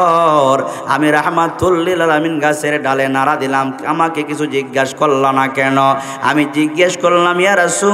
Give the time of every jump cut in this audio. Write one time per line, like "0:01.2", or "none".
0:03.8